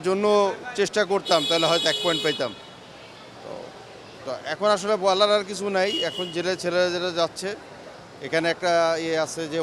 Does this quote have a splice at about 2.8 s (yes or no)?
no